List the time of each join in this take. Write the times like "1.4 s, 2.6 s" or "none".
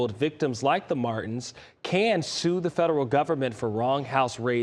none